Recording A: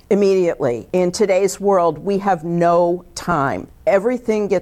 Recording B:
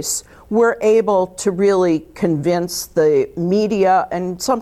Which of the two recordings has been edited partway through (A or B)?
A